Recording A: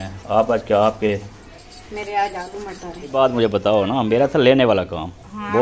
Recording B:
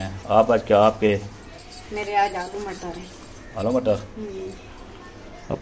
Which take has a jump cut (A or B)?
A